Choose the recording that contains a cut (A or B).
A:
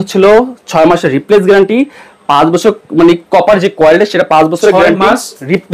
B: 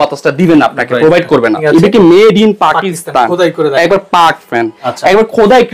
B